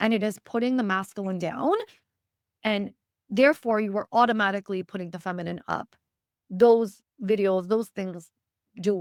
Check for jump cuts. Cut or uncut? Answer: uncut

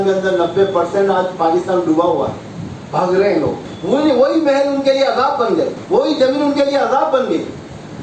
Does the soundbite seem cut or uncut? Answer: cut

